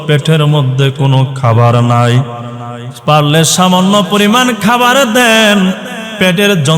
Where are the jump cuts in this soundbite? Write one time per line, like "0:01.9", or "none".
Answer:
none